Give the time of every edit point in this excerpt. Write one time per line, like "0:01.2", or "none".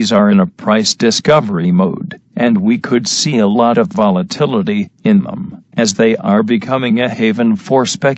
0:01.9